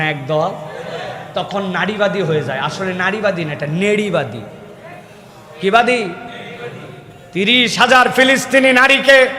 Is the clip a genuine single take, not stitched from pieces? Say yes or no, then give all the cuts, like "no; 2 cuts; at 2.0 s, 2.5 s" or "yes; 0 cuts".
yes; 0 cuts